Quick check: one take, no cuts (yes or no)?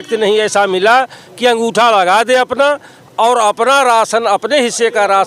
yes